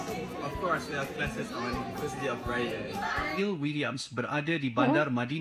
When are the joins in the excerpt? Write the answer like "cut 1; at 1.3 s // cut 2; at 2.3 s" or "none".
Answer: cut 1; at 3.4 s